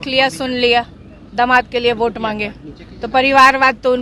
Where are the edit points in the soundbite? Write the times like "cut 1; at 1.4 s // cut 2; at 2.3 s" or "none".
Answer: none